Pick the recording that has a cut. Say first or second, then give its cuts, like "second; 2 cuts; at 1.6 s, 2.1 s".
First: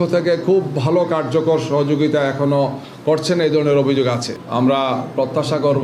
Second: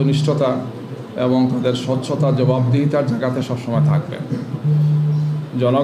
first; 1 cut; at 4.3 s